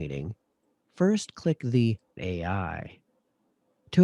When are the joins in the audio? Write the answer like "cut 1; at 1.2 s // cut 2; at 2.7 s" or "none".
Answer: cut 1; at 2.2 s